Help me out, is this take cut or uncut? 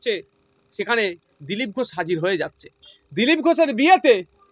uncut